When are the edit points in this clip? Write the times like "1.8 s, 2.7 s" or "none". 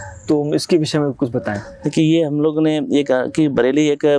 none